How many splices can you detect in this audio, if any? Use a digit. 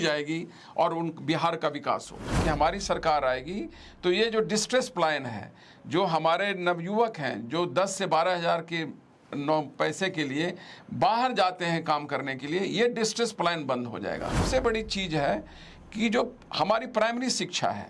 2